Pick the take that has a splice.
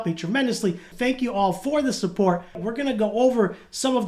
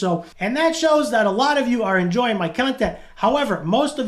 first; 2 cuts; at 0.9 s, 2.6 s

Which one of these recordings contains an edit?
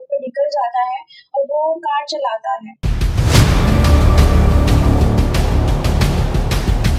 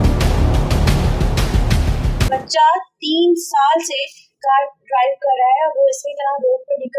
second; 1 cut; at 2.3 s

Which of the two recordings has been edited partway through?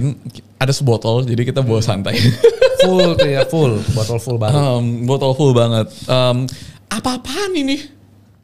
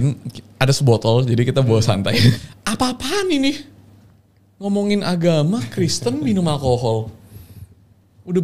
second; 1 cut; at 2.4 s

